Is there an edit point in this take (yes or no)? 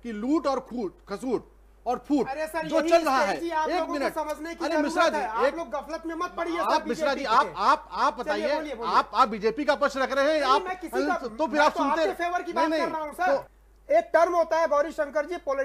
yes